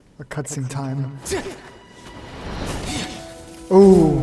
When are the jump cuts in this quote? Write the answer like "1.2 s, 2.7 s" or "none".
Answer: none